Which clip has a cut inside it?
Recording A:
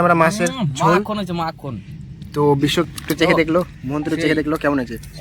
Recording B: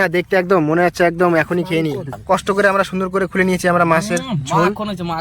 B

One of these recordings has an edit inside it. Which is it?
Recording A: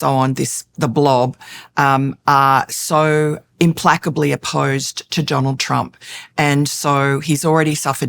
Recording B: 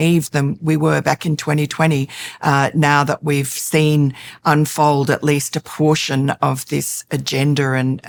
A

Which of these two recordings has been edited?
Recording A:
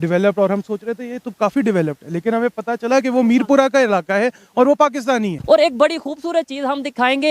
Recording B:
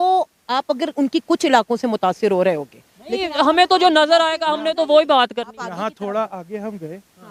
A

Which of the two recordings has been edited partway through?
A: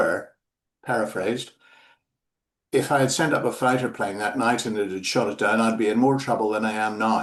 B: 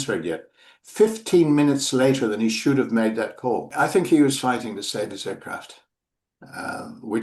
B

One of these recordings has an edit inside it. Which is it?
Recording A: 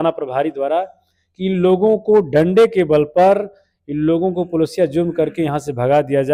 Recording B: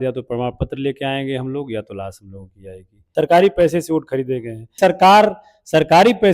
B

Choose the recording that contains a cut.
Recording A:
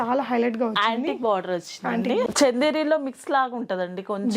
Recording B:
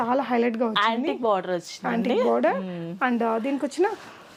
A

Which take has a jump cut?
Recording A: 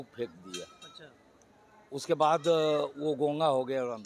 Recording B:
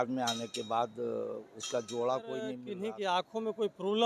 B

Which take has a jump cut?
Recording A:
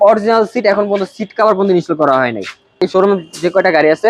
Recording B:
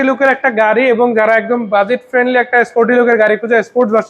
A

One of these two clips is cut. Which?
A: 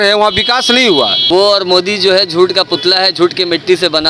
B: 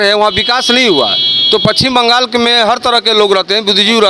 A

